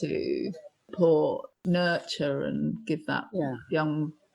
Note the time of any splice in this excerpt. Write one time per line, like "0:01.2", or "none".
0:00.9